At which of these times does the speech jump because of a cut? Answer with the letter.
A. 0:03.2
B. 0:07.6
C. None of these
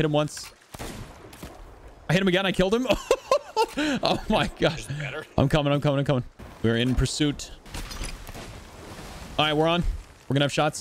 B